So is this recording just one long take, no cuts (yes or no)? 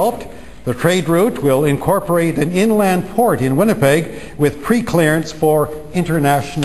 yes